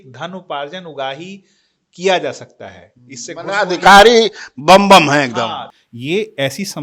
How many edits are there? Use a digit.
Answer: 1